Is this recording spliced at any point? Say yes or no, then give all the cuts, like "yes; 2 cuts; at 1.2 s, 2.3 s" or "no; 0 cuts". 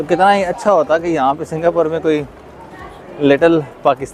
no; 0 cuts